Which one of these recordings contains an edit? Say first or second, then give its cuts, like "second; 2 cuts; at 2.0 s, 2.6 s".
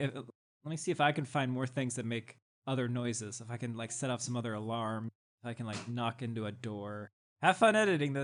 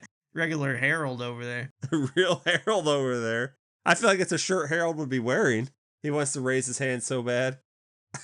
second; 1 cut; at 1.7 s